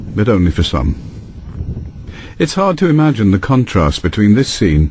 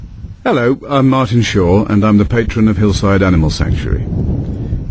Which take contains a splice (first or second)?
first